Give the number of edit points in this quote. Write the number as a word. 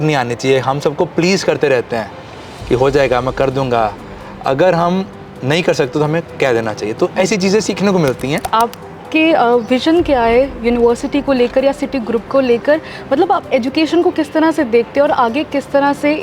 one